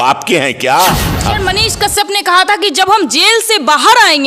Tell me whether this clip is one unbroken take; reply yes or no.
no